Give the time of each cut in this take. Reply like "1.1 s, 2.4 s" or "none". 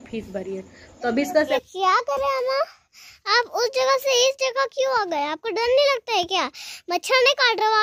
1.5 s

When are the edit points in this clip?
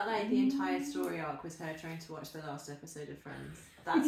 none

